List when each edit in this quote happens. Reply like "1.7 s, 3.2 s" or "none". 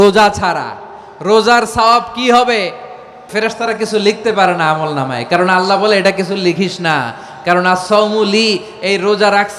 3.3 s